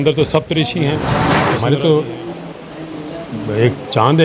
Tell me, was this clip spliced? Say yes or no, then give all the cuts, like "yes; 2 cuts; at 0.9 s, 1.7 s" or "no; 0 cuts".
yes; 1 cut; at 1.3 s